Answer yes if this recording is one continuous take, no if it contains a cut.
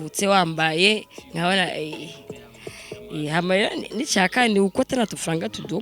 yes